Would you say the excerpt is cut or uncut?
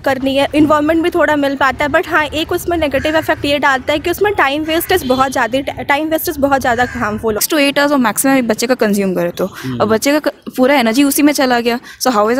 cut